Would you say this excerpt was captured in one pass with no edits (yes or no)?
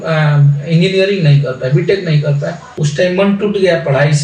yes